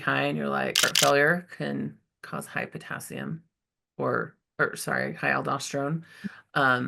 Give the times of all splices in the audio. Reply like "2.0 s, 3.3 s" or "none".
0.9 s